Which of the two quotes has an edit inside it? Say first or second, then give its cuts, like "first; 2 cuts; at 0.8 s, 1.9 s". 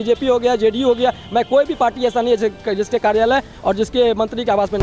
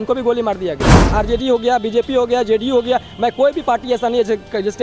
second; 1 cut; at 0.9 s